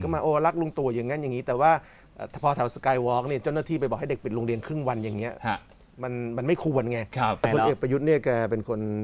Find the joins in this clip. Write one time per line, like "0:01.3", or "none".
0:07.4